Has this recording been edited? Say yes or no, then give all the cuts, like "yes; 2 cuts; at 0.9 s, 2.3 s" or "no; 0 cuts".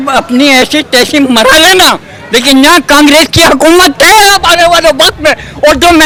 no; 0 cuts